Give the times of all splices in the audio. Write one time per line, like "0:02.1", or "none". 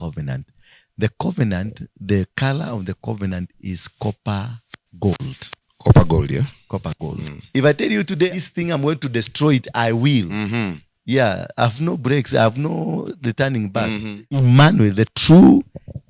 0:07.4
0:14.4